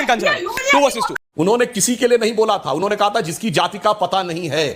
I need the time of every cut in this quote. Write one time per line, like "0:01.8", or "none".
0:01.1

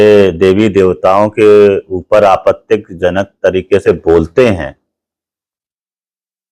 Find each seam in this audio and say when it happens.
none

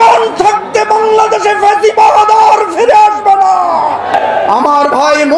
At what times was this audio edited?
0:04.1

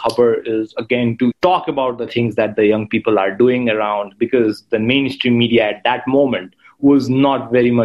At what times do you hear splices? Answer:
0:01.4

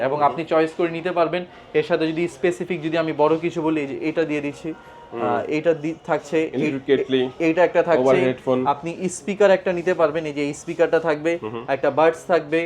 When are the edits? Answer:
none

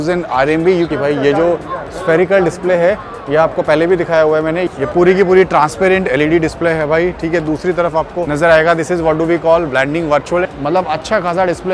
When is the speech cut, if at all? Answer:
0:00.9
0:04.7
0:08.3
0:10.5

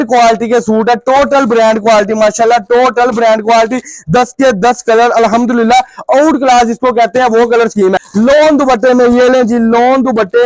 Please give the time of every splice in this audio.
0:08.0

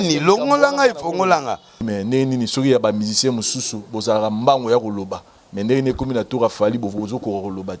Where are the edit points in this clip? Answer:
0:01.8

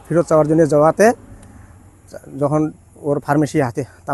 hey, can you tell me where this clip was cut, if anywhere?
none

